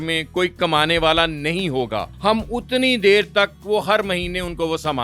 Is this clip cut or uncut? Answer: cut